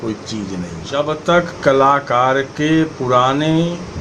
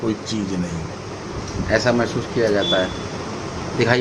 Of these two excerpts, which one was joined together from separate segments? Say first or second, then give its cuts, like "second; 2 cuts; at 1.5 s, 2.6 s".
first; 1 cut; at 1.0 s